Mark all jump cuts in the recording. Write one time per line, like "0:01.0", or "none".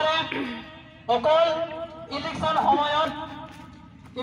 none